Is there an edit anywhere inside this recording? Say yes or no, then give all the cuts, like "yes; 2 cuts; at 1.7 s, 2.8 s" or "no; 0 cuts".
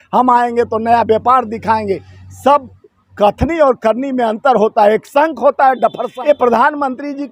yes; 1 cut; at 6.1 s